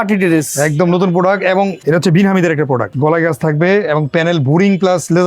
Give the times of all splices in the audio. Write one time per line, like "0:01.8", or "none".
0:01.8
0:02.9